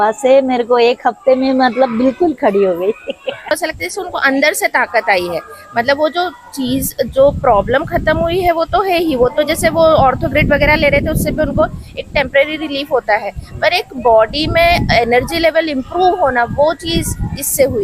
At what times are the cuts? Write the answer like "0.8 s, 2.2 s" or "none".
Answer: 3.5 s